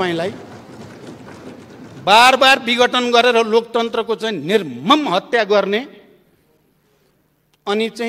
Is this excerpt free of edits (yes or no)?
yes